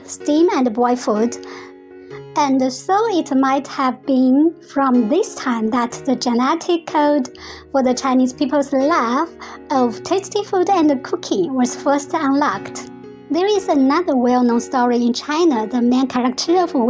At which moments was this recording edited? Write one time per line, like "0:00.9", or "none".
0:01.6